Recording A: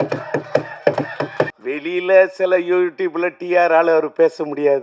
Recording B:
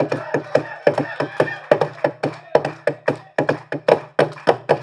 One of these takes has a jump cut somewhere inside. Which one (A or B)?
A